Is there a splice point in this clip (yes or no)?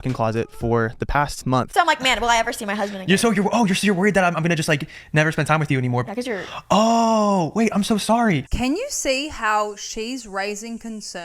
yes